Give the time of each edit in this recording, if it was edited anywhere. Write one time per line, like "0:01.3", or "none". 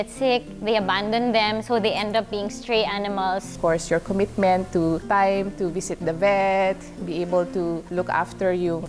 0:03.5
0:05.0
0:07.8